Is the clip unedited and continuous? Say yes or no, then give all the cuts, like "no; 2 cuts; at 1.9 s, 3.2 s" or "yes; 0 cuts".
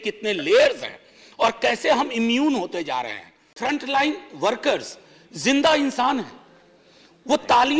no; 1 cut; at 3.5 s